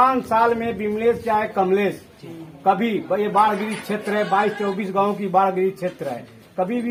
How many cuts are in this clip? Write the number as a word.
zero